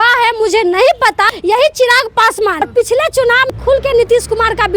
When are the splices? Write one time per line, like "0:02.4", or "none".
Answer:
0:01.3
0:02.6
0:03.5